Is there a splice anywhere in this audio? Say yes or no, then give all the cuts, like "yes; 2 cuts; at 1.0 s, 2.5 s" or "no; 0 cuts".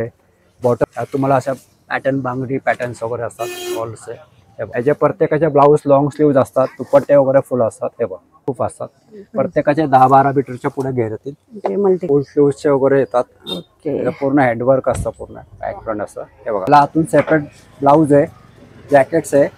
yes; 5 cuts; at 0.8 s, 4.7 s, 8.4 s, 12.0 s, 16.7 s